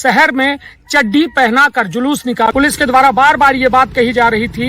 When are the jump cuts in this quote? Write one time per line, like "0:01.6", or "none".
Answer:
0:02.5